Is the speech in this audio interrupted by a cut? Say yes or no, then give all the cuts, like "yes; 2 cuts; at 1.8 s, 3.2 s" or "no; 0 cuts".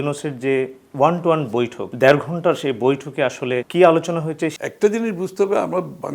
yes; 3 cuts; at 1.8 s, 3.7 s, 4.5 s